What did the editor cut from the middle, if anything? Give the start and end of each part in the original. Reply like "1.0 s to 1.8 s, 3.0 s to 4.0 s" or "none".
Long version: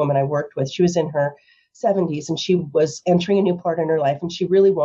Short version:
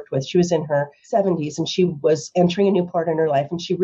1.4 s to 1.7 s